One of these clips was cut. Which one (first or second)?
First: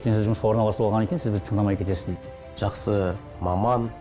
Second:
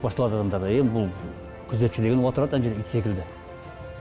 first